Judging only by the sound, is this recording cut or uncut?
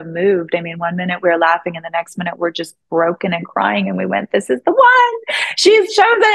uncut